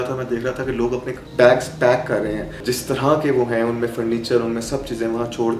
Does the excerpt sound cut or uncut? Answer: cut